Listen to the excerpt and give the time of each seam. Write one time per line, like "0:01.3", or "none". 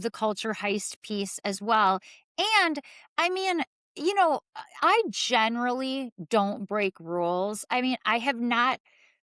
none

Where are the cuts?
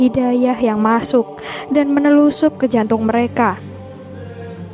0:03.6

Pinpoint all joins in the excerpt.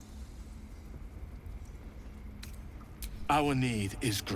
0:03.3

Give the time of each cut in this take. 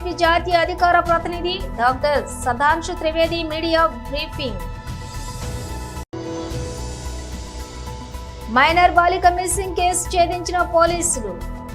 0:04.6
0:06.1
0:08.5

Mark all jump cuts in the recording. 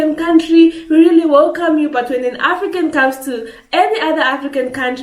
none

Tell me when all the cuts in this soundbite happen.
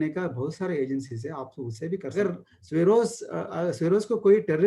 0:02.1

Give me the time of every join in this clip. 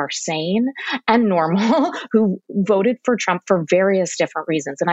none

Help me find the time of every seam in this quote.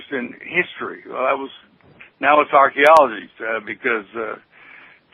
none

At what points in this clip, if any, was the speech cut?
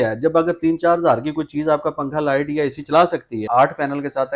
0:03.4

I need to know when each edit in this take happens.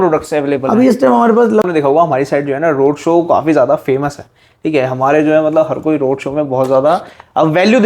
0:01.7

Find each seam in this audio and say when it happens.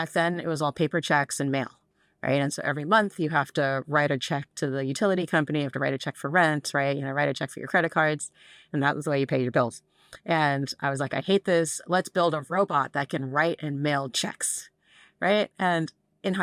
none

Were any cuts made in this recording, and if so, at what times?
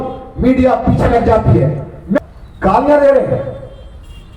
0:02.2

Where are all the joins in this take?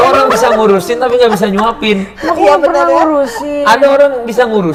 none

